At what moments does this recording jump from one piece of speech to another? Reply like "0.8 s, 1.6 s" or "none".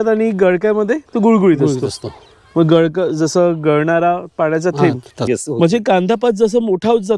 5.3 s